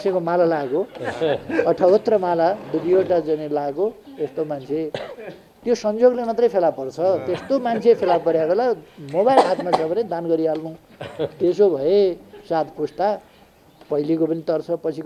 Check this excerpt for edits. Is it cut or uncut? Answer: uncut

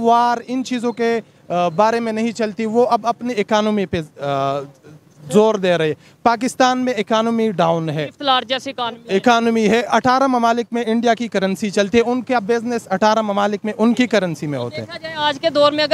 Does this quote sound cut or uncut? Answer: uncut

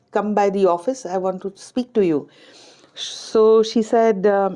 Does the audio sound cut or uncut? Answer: uncut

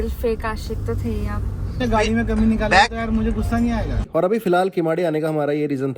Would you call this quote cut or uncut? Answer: cut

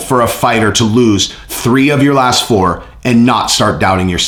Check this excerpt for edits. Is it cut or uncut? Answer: uncut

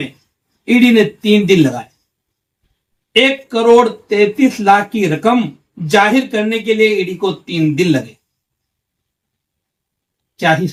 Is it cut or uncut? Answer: uncut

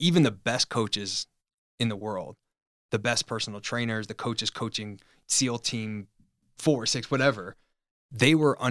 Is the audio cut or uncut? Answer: cut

